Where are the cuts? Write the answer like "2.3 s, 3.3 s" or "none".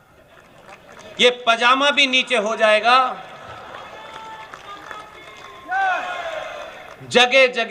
none